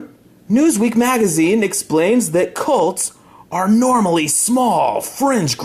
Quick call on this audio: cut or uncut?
uncut